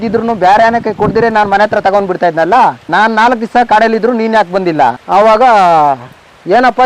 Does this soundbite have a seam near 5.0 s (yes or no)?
yes